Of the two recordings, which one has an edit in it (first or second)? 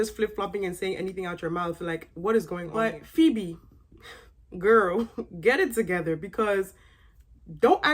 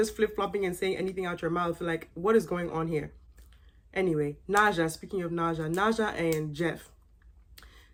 first